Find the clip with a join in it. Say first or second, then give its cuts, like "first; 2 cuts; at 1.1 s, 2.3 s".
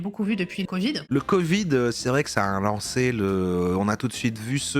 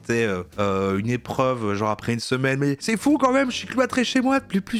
first; 1 cut; at 1.0 s